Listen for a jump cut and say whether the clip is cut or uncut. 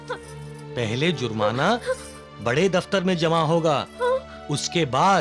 uncut